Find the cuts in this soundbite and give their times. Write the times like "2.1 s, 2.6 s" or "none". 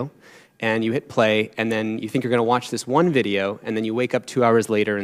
none